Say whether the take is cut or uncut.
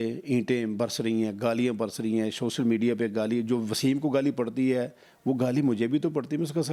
uncut